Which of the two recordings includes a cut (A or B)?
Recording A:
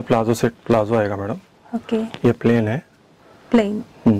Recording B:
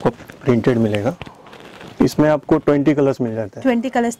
B